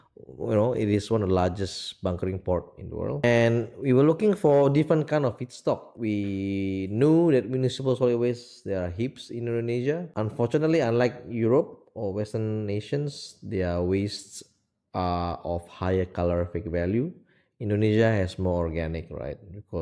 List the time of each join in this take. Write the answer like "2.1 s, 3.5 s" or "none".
3.2 s, 5.9 s, 10.1 s